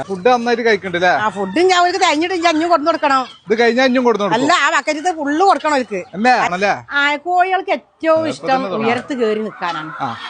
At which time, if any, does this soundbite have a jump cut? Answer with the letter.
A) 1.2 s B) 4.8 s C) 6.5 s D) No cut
C